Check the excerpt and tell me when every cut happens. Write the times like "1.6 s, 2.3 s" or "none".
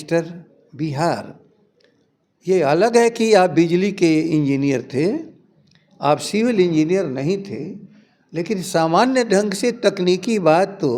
none